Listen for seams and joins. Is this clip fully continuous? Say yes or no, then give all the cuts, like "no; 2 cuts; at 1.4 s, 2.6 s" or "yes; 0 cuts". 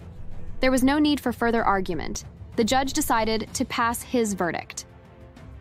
yes; 0 cuts